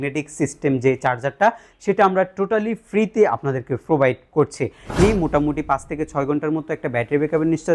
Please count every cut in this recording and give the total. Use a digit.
1